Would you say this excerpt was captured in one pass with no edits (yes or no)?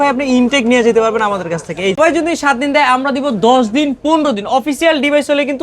no